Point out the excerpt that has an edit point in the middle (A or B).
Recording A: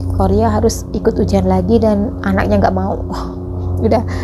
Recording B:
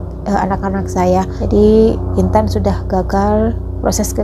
B